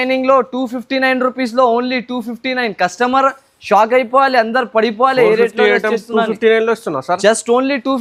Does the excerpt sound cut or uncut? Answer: uncut